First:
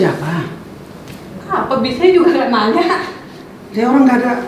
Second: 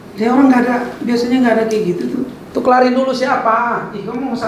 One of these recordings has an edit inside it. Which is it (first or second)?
second